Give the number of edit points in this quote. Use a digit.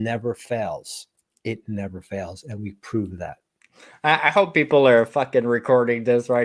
0